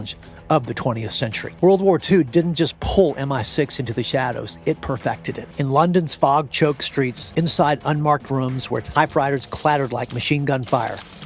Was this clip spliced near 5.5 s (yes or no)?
yes